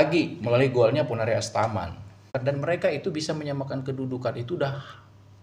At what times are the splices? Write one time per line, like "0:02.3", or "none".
0:02.3